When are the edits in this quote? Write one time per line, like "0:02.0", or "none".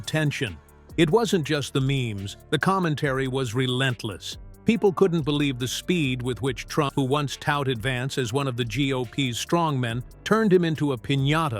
0:06.9